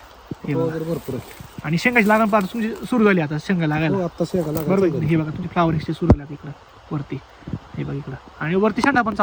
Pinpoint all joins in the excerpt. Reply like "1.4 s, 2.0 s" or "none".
none

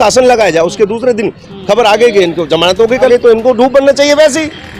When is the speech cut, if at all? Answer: 3.1 s

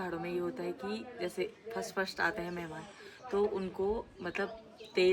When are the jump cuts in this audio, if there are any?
none

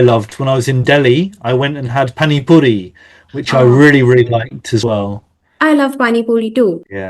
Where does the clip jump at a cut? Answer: 4.8 s

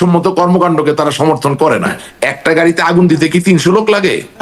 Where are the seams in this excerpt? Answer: 2.0 s

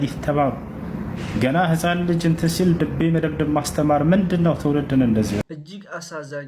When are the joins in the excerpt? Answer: 5.4 s

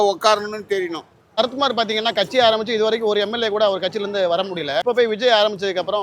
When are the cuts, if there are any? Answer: 1.4 s, 4.8 s

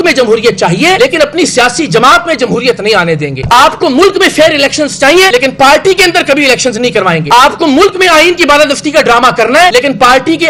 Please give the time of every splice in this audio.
none

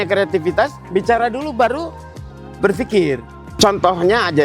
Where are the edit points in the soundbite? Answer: 3.4 s

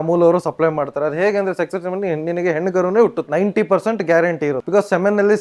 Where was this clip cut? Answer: 3.2 s, 4.6 s

